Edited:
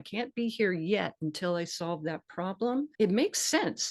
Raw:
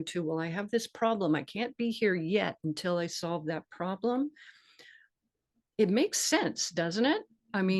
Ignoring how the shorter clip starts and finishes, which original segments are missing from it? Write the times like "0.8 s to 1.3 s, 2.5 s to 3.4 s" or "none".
4.3 s to 5.7 s